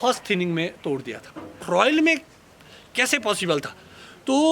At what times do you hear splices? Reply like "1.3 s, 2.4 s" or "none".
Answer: 1.6 s